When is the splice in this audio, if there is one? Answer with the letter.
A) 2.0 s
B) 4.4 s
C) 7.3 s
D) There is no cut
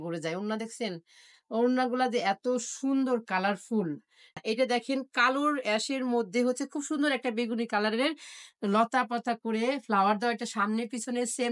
B